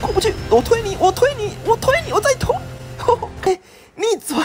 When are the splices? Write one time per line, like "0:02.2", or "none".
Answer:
0:03.5